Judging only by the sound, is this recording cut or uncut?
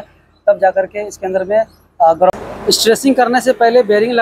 cut